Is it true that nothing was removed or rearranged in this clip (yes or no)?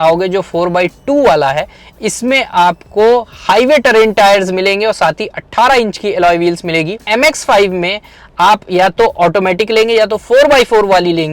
no